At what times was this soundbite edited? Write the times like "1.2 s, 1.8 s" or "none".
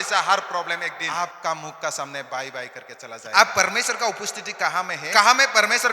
1.0 s, 3.2 s, 5.0 s